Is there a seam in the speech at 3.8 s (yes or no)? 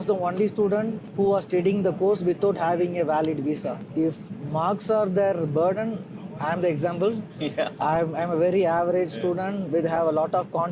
yes